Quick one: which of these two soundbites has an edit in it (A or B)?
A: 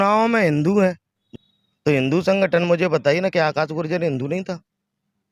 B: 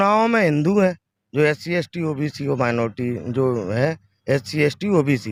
A